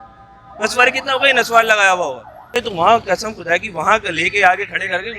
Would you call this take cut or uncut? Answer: cut